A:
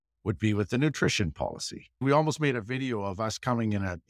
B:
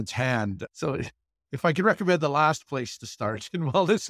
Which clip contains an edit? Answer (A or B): A